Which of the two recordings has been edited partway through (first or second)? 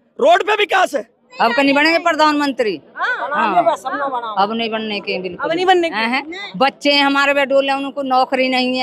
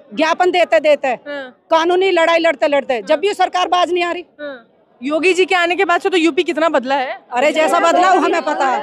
first